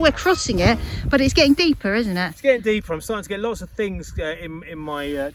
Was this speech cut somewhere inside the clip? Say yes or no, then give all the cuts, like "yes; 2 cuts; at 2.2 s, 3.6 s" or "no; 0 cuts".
no; 0 cuts